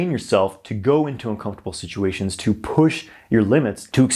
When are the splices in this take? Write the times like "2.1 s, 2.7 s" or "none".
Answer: none